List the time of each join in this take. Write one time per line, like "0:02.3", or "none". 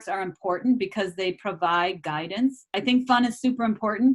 0:02.6

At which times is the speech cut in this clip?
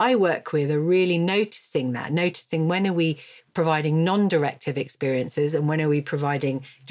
0:03.3

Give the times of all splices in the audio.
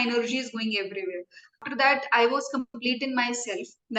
0:01.6

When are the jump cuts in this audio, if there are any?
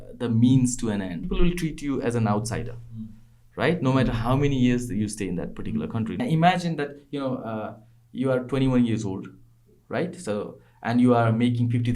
0:01.2
0:06.2

